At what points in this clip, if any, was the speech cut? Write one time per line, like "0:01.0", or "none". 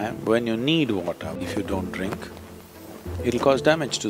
0:01.4